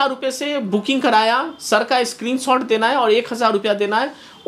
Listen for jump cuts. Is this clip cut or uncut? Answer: uncut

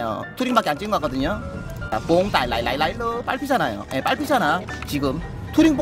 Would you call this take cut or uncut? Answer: cut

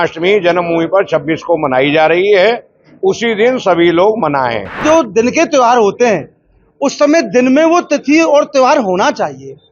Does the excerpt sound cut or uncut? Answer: cut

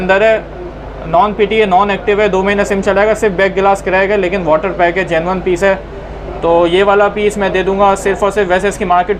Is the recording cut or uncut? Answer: uncut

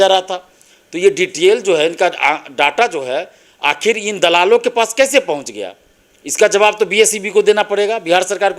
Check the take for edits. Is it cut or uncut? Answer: uncut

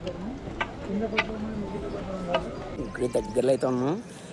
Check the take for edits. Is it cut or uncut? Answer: cut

